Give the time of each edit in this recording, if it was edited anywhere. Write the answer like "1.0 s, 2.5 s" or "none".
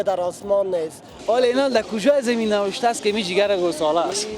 1.1 s